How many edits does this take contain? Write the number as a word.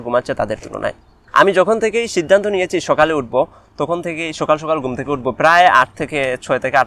one